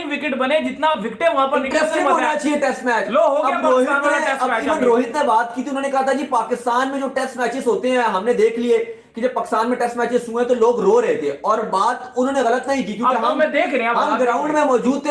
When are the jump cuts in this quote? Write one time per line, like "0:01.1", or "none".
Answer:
none